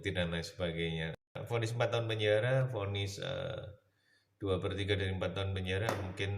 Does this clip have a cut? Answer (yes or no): yes